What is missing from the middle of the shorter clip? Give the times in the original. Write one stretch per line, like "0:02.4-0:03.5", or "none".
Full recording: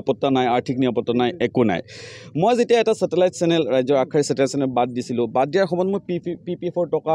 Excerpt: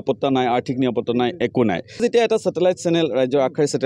0:02.0-0:02.6